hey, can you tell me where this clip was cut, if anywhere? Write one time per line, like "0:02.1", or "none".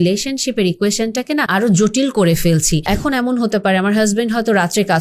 0:01.5
0:02.8